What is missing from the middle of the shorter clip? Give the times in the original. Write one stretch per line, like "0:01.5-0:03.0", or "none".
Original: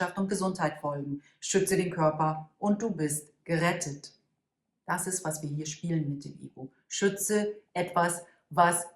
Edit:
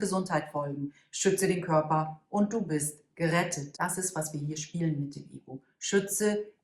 0:03.9-0:04.7